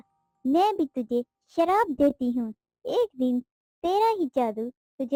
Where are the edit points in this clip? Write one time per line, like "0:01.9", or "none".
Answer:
none